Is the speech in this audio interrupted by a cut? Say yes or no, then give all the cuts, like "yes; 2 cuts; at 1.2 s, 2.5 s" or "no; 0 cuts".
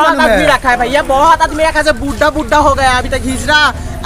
no; 0 cuts